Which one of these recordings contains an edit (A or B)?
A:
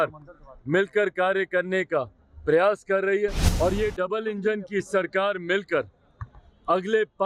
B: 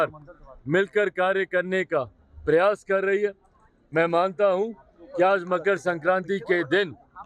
A